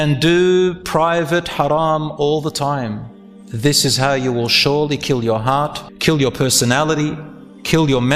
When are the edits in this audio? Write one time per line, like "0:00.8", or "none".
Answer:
0:05.8